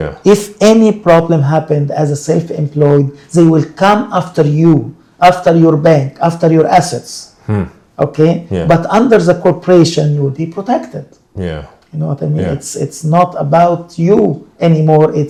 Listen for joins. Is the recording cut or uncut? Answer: uncut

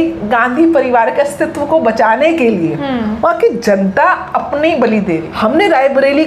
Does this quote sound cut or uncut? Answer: cut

